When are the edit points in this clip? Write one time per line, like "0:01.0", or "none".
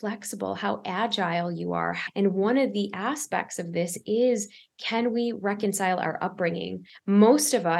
0:02.0
0:06.9